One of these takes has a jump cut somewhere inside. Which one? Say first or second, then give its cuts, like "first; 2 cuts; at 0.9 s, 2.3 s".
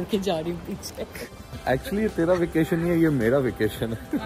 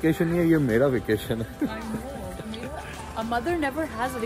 first; 1 cut; at 1.2 s